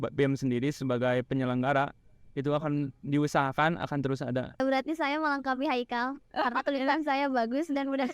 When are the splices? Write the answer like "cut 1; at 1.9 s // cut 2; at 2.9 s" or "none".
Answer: cut 1; at 4.6 s